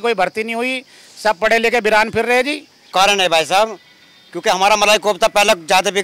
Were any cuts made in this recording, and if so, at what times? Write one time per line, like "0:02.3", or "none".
0:02.9